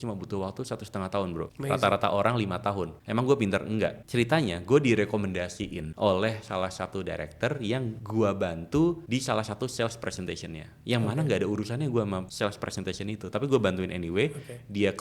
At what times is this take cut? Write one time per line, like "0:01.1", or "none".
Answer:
0:01.5
0:02.9
0:04.0
0:05.8
0:07.9
0:09.0
0:12.3